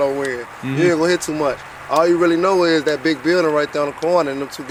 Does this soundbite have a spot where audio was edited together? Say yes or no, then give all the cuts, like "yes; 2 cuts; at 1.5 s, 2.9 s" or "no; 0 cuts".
no; 0 cuts